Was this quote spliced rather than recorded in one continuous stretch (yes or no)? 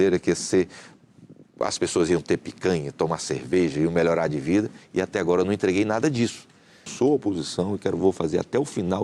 yes